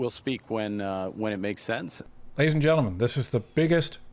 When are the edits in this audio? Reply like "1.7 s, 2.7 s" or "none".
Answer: 2.0 s